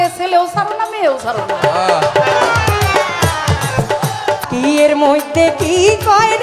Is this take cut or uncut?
cut